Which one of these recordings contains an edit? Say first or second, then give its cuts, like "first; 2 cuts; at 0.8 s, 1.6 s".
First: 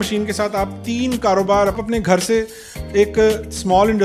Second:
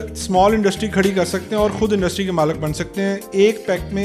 first; 1 cut; at 1.8 s